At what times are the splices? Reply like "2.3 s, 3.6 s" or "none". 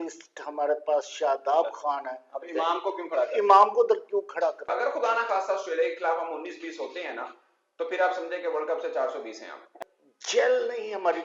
4.7 s, 9.8 s